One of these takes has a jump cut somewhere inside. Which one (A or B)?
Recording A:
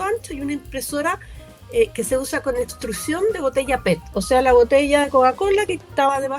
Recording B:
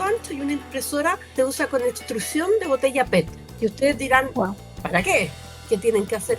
B